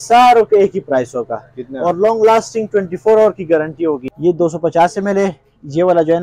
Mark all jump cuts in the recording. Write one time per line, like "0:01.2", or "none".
0:04.1